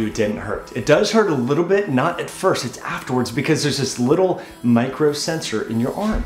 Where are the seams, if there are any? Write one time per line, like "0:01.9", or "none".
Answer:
none